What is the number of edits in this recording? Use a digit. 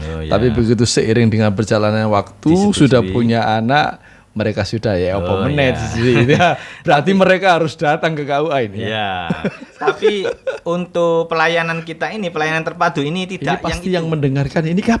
1